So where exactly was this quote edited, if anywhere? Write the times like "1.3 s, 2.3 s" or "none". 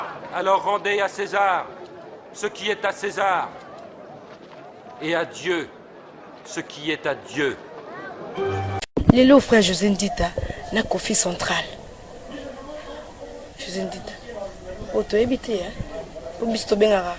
8.9 s